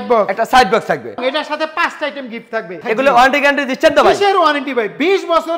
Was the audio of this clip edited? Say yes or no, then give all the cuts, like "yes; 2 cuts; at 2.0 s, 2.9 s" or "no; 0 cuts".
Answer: yes; 2 cuts; at 1.2 s, 2.7 s